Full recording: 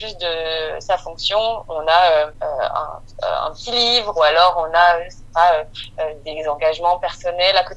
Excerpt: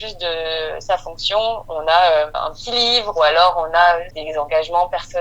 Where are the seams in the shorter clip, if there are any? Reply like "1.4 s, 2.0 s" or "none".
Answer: 2.4 s, 4.2 s